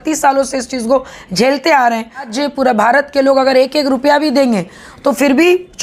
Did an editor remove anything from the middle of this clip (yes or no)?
yes